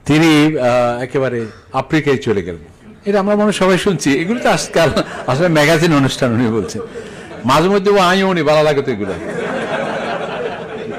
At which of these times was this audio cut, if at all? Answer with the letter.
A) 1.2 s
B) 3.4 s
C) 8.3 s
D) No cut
D